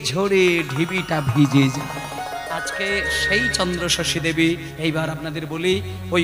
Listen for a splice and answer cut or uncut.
cut